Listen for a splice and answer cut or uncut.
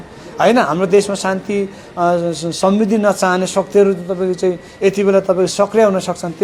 uncut